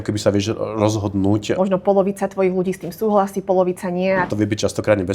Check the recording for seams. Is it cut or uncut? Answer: cut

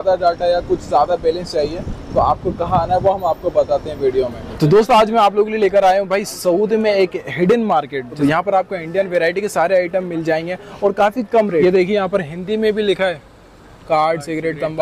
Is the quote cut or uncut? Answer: cut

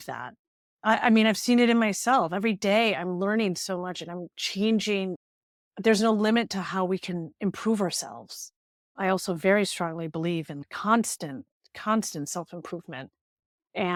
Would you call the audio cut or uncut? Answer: uncut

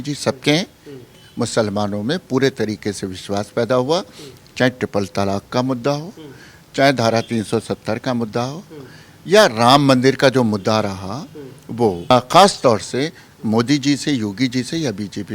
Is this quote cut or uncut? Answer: cut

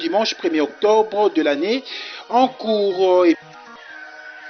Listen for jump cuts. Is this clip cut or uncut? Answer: cut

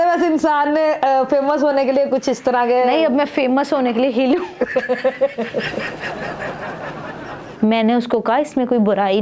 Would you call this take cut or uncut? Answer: cut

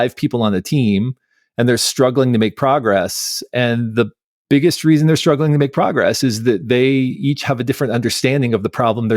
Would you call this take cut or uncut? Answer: uncut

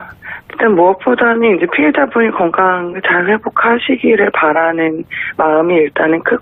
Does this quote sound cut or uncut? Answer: uncut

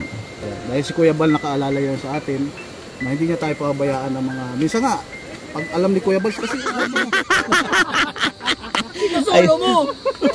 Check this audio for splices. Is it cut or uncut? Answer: cut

